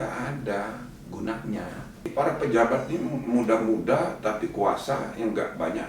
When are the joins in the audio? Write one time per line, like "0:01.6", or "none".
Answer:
0:02.1